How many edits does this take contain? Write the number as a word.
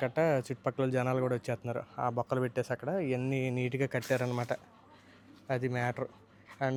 zero